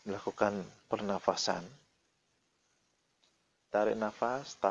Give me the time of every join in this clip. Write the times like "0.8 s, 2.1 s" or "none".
none